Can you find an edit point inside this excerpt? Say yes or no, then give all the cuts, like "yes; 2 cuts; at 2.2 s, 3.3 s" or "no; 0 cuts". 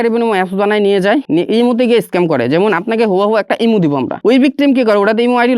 yes; 2 cuts; at 1.2 s, 4.1 s